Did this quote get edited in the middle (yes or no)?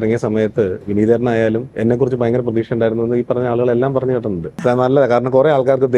yes